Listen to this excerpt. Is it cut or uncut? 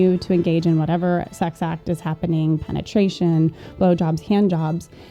uncut